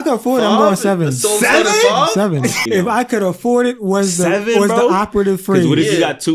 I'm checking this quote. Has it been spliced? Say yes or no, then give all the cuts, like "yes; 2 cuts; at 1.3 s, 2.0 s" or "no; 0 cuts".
yes; 1 cut; at 2.6 s